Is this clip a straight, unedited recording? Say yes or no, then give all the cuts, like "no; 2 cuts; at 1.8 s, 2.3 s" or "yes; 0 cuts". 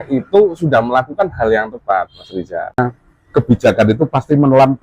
no; 1 cut; at 2.8 s